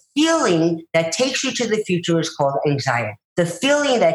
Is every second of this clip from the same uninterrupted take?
no; 1 cut; at 3.2 s

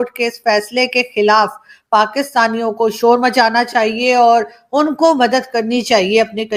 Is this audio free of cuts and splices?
yes; 0 cuts

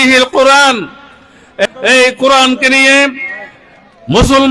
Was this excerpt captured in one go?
no; 1 cut; at 1.7 s

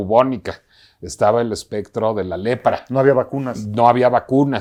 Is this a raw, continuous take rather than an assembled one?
yes; 0 cuts

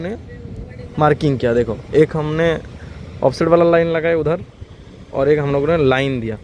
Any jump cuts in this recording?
no; 0 cuts

